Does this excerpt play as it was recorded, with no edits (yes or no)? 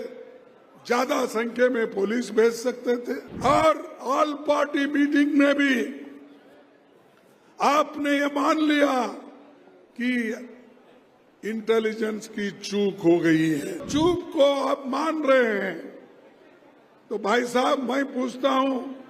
no